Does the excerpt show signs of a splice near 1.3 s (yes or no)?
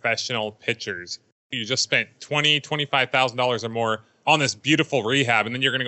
yes